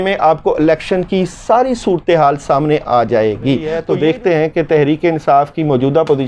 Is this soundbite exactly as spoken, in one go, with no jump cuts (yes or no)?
no